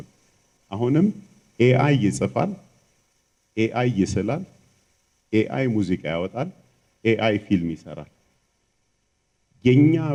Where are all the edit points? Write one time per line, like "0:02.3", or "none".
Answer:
none